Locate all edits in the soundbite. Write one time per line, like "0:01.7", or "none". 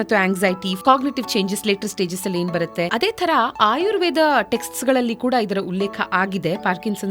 0:02.9